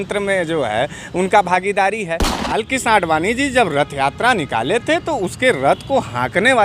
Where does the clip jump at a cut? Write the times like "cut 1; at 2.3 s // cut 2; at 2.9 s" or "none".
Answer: cut 1; at 2.5 s